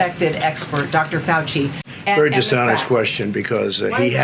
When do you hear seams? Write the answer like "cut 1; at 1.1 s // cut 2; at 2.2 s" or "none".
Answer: cut 1; at 1.8 s